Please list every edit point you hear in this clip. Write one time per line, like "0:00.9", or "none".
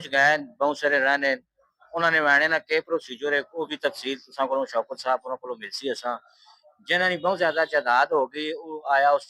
none